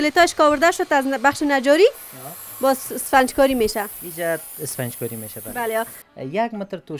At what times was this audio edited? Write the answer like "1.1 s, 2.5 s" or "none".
6.0 s

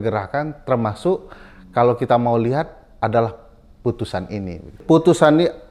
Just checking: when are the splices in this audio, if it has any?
4.7 s

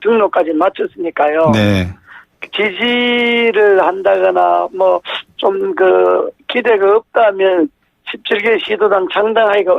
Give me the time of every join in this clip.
5.9 s

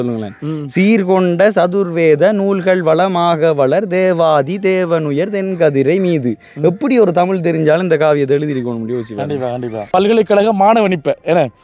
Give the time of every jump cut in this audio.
9.9 s

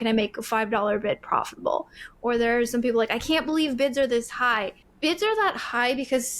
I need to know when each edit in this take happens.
none

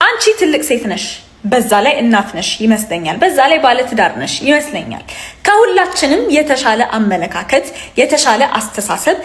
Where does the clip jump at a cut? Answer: none

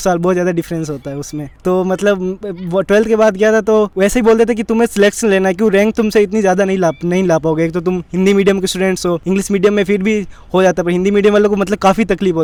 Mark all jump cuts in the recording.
none

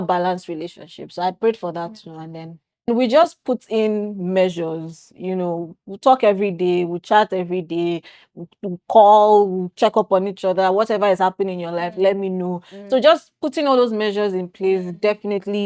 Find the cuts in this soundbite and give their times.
2.9 s

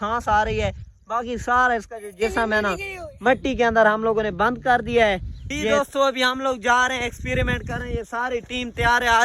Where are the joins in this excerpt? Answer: 5.7 s

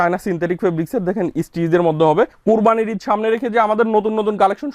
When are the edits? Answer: 2.4 s

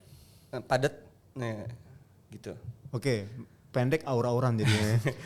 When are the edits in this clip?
none

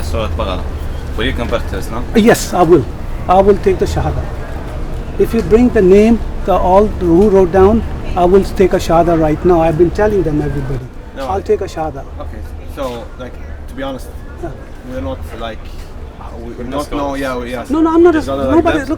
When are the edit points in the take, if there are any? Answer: none

